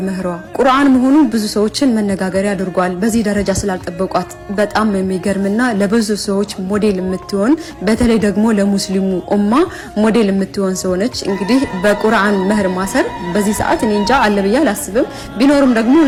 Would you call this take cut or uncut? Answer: uncut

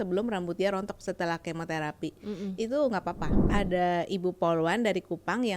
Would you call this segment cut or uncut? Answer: cut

